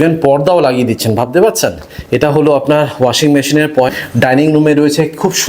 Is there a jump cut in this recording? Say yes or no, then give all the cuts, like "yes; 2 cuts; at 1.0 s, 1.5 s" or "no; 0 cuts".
yes; 1 cut; at 3.9 s